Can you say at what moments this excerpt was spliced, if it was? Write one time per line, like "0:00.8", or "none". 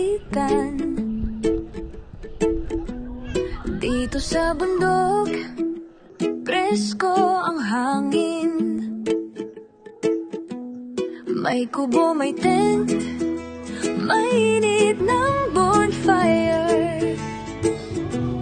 none